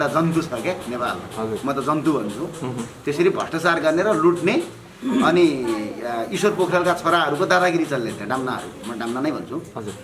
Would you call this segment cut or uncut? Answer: uncut